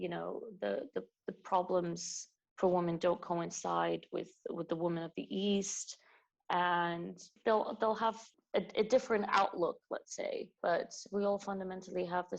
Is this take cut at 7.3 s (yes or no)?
yes